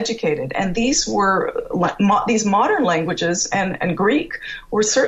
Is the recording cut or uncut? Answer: uncut